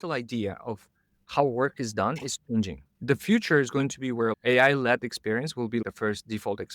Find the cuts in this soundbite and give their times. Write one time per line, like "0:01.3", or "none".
0:02.9
0:04.3
0:05.8